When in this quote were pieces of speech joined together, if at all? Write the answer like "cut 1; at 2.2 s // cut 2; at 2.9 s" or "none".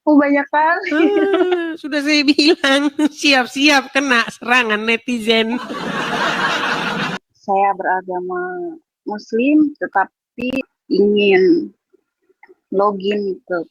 cut 1; at 7.3 s // cut 2; at 10.7 s